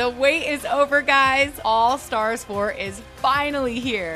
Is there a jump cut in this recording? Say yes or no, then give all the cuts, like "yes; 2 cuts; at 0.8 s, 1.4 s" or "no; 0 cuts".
no; 0 cuts